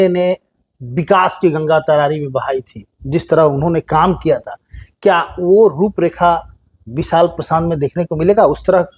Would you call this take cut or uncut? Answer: uncut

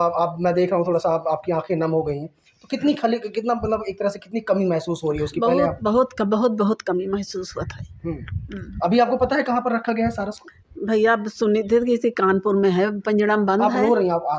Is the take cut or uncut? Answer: uncut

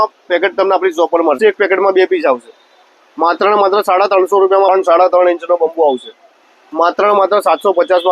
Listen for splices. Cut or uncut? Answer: cut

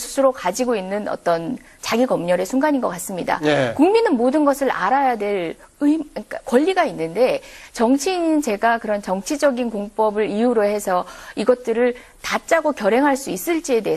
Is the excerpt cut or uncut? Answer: cut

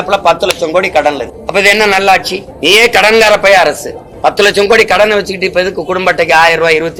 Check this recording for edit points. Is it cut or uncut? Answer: uncut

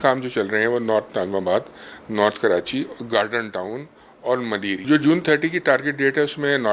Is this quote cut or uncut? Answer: cut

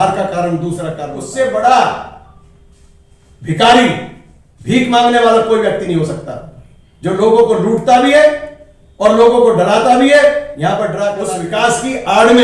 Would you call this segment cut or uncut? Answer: cut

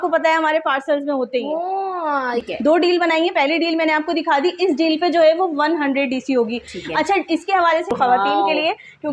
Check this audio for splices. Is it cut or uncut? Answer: cut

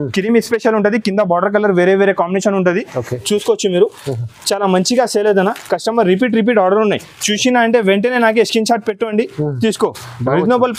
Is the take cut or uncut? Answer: uncut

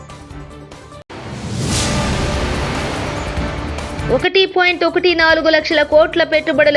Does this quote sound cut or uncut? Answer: cut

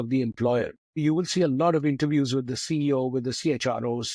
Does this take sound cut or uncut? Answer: cut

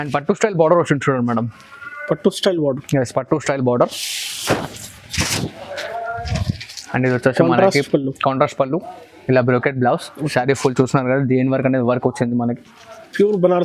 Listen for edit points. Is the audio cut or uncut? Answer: uncut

